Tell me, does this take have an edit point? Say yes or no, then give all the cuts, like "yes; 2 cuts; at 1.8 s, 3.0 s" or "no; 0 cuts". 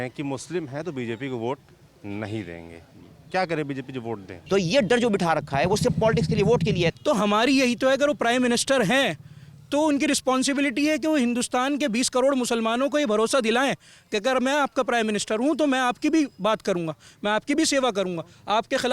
yes; 2 cuts; at 4.3 s, 6.9 s